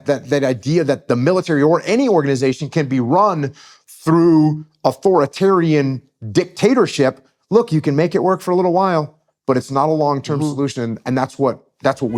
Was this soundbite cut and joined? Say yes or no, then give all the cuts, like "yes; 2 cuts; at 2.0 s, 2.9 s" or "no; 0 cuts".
no; 0 cuts